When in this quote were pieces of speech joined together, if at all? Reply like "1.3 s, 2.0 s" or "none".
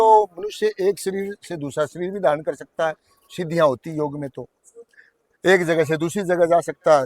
none